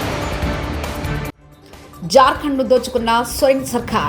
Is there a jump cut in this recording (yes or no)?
yes